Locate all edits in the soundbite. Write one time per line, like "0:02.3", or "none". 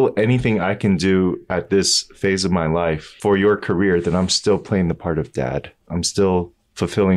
0:03.1
0:05.8